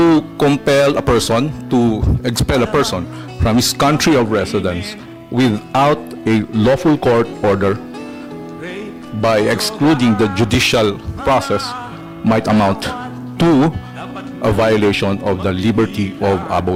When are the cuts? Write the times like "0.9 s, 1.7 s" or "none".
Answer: none